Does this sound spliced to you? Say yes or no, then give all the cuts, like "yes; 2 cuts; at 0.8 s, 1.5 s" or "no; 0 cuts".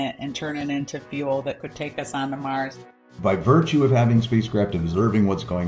yes; 1 cut; at 2.8 s